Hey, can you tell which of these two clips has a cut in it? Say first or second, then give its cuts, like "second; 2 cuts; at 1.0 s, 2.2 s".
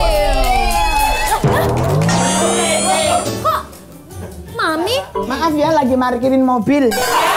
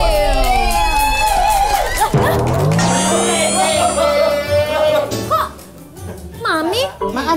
first; 2 cuts; at 1.2 s, 3.2 s